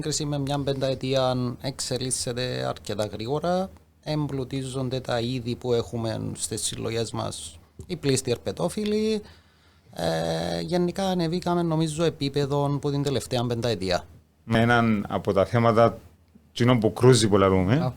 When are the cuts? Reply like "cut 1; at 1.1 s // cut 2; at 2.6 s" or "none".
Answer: cut 1; at 14.5 s